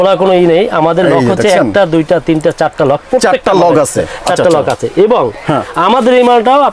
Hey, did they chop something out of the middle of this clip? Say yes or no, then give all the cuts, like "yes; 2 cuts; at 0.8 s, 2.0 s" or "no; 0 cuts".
no; 0 cuts